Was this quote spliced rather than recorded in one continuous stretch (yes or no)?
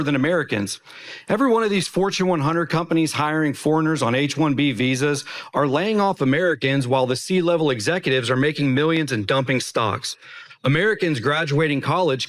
no